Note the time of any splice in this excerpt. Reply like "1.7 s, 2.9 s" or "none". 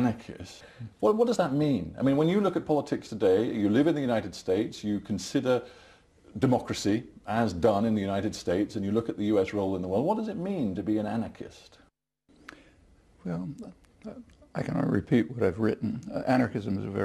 none